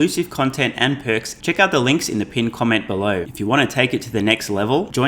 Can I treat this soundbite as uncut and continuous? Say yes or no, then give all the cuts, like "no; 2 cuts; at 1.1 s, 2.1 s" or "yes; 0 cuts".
no; 2 cuts; at 1.3 s, 3.3 s